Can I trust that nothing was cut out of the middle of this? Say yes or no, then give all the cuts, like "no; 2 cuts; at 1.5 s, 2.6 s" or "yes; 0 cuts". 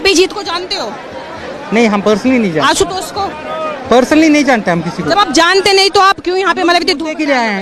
yes; 0 cuts